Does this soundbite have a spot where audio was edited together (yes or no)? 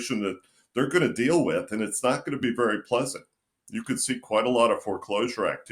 no